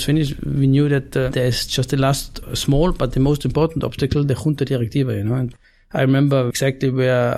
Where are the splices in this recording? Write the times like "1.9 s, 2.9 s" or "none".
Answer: 1.3 s, 2.4 s, 5.5 s, 6.5 s